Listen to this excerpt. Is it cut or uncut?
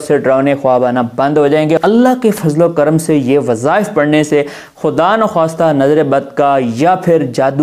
cut